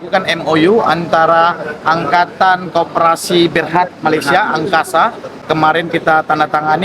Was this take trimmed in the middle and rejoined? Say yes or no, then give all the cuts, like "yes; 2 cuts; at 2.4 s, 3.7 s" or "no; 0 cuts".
yes; 1 cut; at 5.3 s